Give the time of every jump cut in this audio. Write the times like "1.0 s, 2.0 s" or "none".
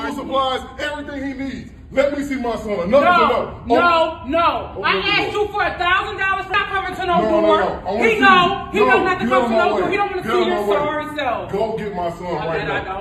8.1 s